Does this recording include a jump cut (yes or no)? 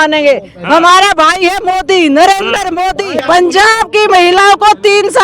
yes